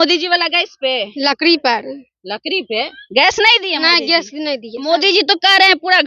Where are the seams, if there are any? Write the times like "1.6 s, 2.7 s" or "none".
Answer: 4.7 s